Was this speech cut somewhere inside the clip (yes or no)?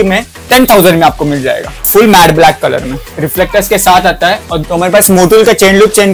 yes